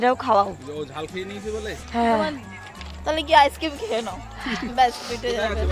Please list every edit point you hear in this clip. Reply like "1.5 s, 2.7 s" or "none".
none